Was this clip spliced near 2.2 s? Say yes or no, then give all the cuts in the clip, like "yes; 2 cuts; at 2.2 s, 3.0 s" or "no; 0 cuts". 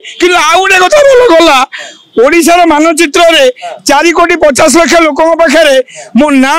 no; 0 cuts